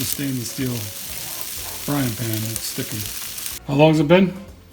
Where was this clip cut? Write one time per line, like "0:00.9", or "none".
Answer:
0:03.5